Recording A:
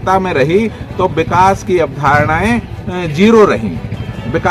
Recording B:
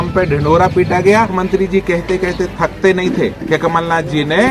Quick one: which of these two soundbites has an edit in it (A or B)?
B